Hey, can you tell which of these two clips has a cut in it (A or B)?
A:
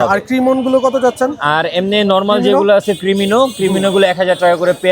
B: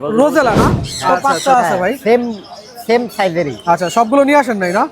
B